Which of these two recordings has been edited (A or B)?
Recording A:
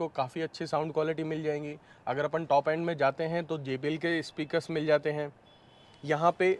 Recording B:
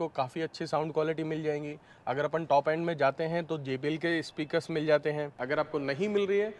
B